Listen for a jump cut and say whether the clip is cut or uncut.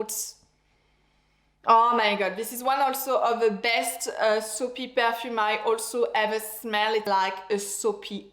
cut